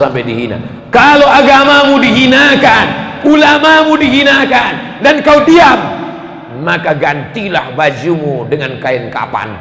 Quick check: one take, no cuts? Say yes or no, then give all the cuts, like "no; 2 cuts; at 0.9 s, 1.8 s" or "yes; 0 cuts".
yes; 0 cuts